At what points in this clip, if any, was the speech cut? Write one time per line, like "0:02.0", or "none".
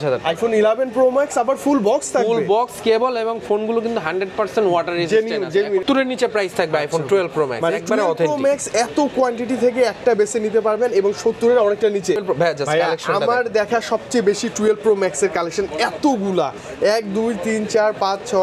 0:05.8
0:12.2